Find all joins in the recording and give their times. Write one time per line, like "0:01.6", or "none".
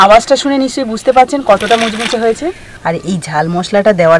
0:02.7